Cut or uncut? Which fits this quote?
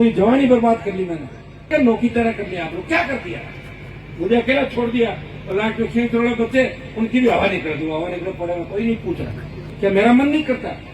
cut